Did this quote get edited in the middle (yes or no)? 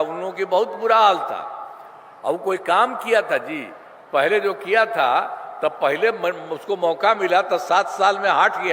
no